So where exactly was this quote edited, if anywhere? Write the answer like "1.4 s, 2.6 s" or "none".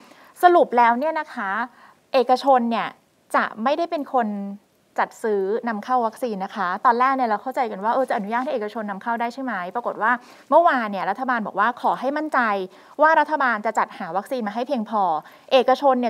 none